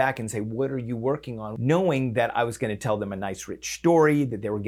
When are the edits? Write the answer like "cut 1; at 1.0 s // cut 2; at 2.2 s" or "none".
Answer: cut 1; at 1.4 s